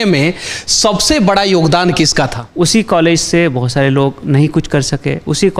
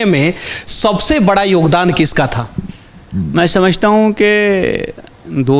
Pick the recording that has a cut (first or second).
first